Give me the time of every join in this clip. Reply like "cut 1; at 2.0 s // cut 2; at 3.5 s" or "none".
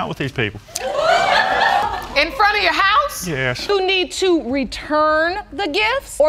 cut 1; at 3.6 s